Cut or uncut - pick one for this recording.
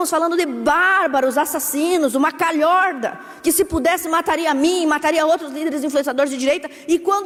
uncut